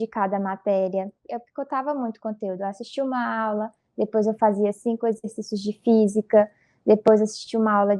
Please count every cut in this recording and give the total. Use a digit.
1